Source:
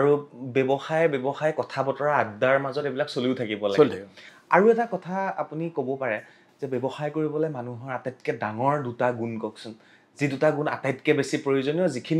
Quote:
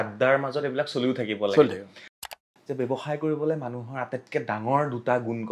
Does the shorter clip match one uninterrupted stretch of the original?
no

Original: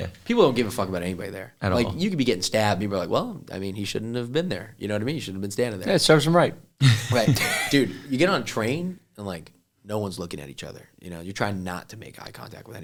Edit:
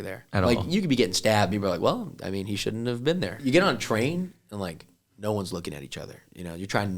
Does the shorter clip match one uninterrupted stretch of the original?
no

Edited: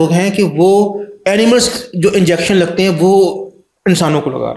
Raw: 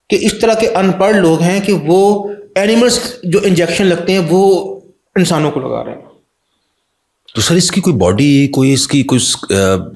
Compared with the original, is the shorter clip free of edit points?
yes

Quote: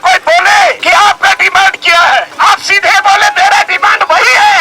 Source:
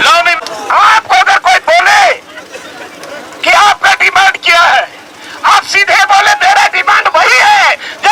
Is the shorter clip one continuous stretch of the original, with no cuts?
no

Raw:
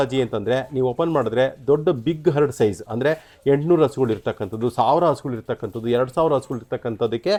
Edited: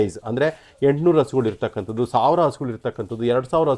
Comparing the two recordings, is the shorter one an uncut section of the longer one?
yes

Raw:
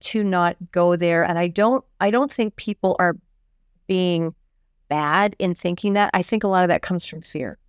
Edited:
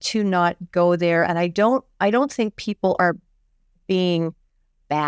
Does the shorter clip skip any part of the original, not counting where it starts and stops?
no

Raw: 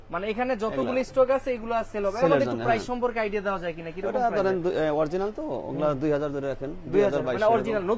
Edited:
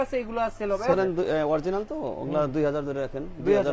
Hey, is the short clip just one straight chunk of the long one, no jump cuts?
no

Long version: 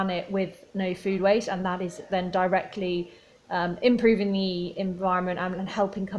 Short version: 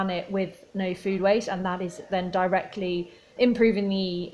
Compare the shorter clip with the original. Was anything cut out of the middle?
yes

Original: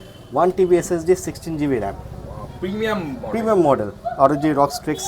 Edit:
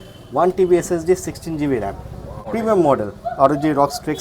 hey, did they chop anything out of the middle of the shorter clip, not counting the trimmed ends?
yes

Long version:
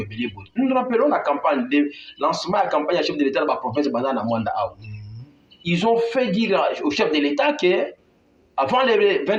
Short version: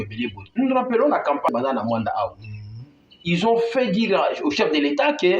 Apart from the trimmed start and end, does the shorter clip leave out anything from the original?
yes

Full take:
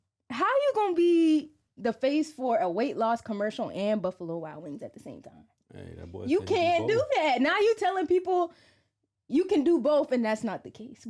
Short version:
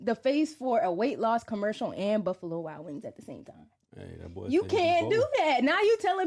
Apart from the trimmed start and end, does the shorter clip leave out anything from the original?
no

